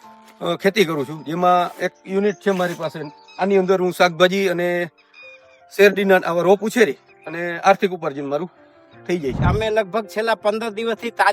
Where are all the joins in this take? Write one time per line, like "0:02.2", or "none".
0:09.4